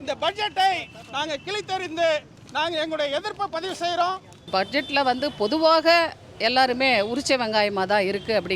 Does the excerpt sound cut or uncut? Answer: cut